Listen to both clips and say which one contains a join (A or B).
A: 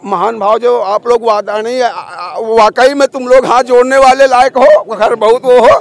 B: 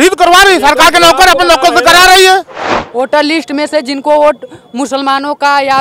B